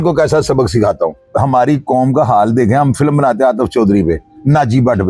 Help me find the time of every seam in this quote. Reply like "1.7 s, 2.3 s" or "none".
1.2 s